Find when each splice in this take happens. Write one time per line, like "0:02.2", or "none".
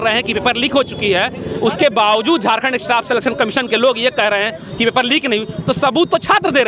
none

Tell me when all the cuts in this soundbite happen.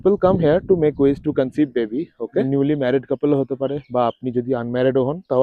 0:02.5

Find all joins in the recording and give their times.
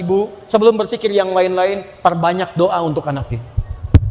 none

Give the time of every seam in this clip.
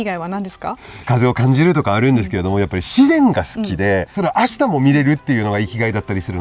0:01.0
0:04.1

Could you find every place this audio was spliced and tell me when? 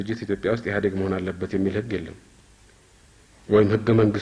none

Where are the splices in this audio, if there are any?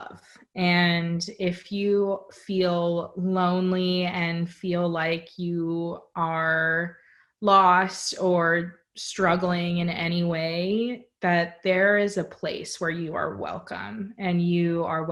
none

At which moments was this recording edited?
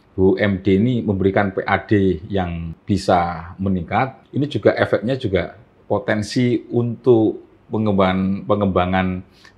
0:02.7
0:04.2

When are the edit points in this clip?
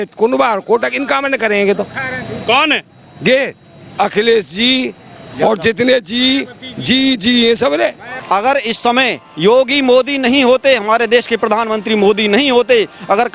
0:08.1

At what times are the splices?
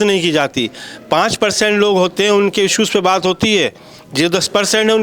none

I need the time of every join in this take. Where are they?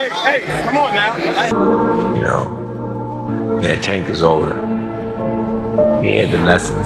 0:01.4

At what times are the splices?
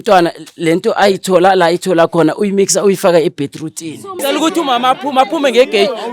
0:04.1

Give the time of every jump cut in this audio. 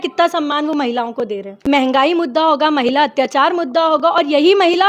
0:01.1

